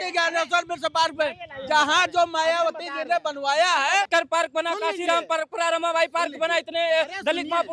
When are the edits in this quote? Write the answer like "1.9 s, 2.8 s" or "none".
4.1 s